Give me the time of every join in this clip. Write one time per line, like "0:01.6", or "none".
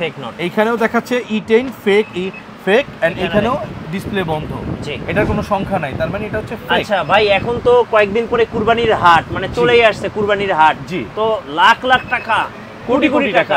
none